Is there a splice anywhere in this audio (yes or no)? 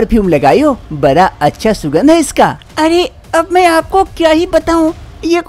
yes